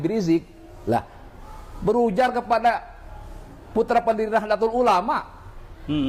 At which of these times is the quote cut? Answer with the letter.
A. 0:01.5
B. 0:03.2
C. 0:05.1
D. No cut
D